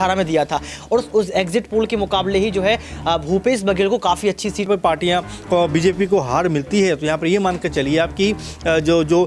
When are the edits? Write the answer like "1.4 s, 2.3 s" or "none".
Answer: 4.7 s